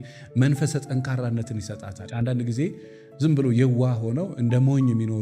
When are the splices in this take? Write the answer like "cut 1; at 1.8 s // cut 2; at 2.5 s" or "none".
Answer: cut 1; at 2.0 s

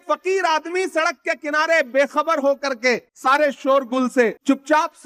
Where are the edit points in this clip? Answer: none

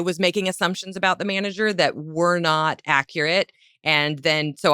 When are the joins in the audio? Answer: none

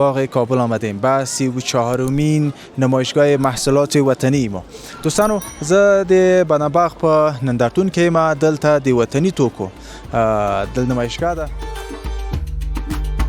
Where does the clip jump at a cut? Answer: cut 1; at 11.6 s

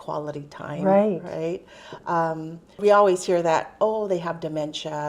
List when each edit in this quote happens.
cut 1; at 2.8 s

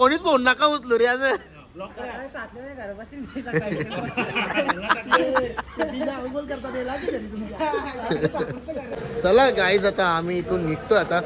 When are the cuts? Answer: cut 1; at 8.9 s

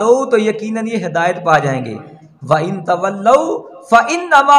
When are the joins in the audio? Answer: none

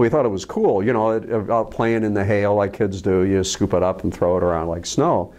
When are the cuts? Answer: none

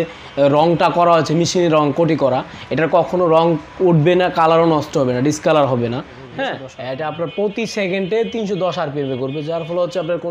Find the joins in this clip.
cut 1; at 6.2 s

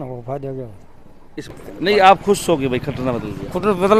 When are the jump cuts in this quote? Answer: cut 1; at 1.5 s

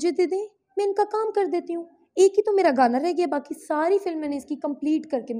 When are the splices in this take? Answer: none

